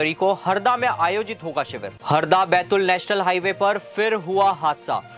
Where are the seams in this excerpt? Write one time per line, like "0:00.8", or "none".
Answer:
0:01.9